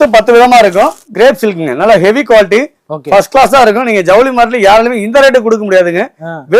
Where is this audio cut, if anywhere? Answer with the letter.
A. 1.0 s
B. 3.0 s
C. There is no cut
A